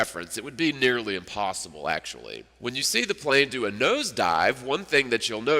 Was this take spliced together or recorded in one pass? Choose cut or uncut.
cut